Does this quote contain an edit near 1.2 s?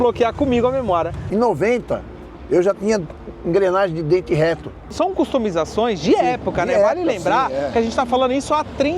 yes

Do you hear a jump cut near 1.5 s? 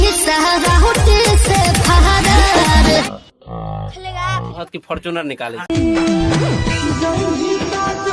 no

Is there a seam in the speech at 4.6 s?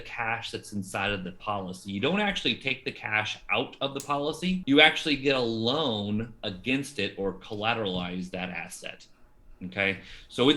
yes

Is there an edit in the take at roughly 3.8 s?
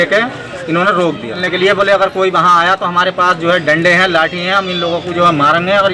no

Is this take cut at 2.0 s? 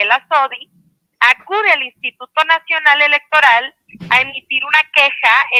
no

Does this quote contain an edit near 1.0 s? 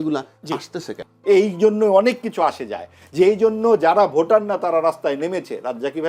yes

